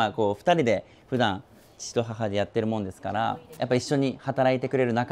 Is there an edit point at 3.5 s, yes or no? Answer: yes